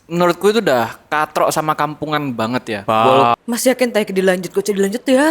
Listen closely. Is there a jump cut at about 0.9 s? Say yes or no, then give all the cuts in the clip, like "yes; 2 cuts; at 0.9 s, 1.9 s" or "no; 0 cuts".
no; 1 cut; at 3.4 s